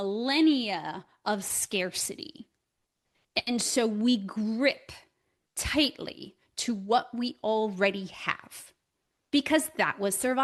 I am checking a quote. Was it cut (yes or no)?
no